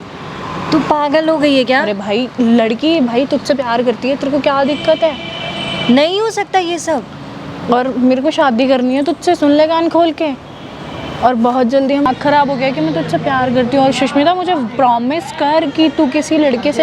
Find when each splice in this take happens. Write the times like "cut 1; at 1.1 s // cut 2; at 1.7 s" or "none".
cut 1; at 12.1 s